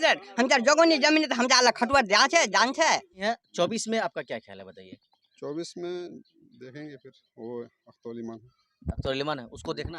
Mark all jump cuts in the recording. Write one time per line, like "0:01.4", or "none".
0:03.0